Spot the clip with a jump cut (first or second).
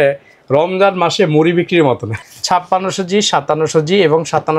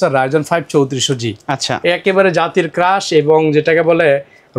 first